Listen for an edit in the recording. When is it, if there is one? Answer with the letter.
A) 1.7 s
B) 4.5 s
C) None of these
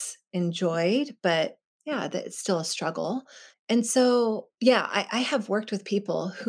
A